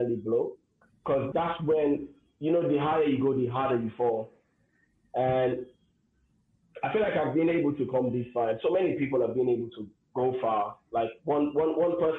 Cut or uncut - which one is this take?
cut